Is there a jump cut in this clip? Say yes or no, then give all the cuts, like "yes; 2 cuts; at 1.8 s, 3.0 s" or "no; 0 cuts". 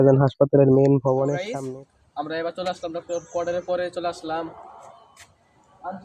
yes; 1 cut; at 1.4 s